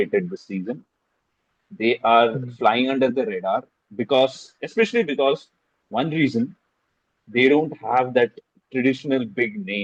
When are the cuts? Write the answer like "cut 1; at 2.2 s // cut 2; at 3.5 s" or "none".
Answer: none